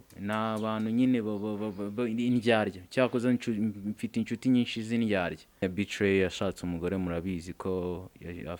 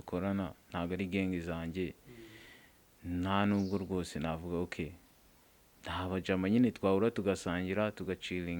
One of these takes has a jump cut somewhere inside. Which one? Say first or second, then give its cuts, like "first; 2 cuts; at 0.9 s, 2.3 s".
first; 1 cut; at 5.6 s